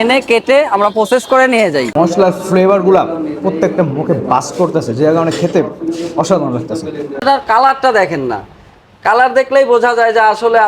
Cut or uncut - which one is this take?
cut